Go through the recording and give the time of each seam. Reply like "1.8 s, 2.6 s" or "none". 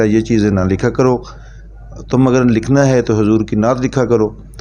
none